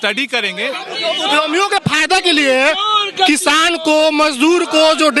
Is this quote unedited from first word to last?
yes; 0 cuts

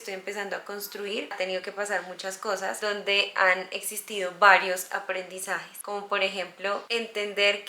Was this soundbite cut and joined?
yes; 1 cut; at 1.3 s

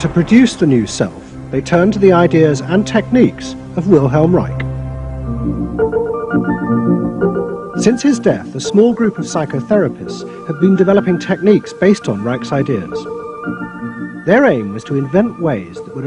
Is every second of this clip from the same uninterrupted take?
yes; 0 cuts

